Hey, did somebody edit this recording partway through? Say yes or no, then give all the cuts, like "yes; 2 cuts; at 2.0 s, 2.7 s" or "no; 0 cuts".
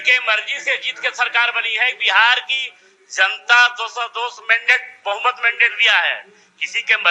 no; 0 cuts